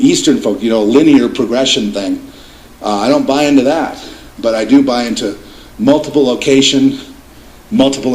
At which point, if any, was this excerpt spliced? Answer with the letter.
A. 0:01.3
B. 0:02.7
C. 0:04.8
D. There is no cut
D